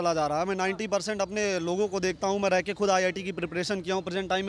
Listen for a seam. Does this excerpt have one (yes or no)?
no